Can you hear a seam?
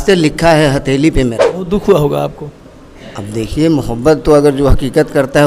yes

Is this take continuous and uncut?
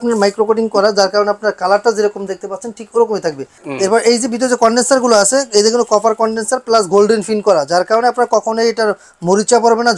no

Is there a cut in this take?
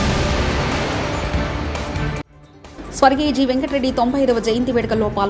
no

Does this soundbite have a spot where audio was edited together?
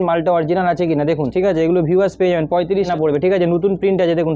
yes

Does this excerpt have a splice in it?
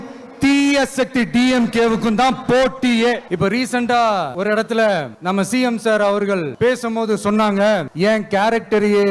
yes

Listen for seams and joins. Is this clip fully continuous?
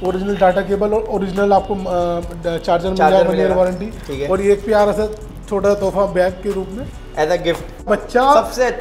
no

